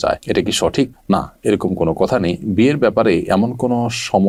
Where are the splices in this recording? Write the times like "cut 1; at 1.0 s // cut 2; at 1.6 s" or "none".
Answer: none